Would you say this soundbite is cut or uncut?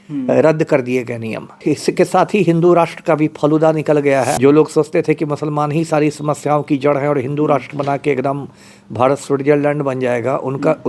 cut